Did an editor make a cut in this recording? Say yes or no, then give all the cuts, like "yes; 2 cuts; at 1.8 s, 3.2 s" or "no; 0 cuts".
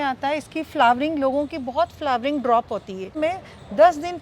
yes; 1 cut; at 3.1 s